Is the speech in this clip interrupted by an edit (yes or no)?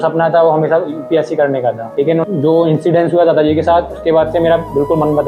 no